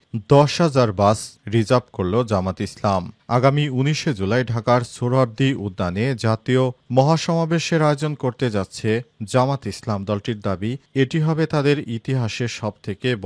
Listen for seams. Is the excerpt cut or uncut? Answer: uncut